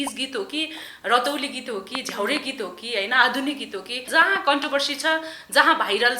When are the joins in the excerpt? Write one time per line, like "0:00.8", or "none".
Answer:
0:04.0